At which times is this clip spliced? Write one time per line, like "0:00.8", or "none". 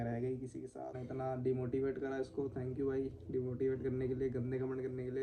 0:01.0